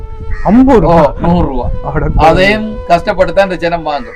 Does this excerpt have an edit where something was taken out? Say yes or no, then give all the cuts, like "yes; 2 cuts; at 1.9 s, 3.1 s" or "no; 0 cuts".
no; 0 cuts